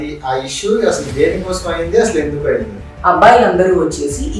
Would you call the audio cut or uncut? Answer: cut